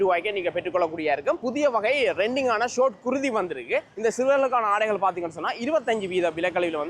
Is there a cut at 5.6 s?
no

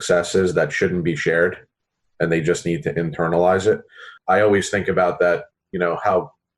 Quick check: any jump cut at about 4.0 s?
yes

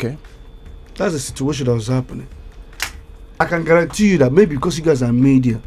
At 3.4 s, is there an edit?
yes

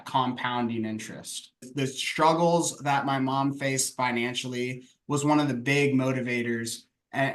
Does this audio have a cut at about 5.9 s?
no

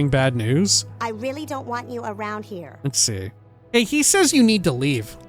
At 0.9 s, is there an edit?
no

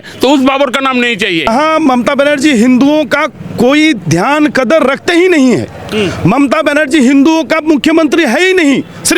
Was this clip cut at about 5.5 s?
no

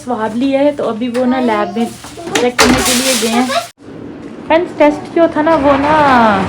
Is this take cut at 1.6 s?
no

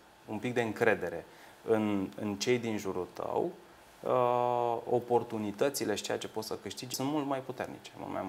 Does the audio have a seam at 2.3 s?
no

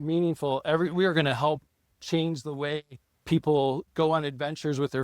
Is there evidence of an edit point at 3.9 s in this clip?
yes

